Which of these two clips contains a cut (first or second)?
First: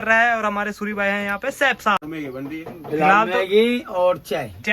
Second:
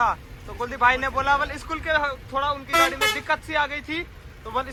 first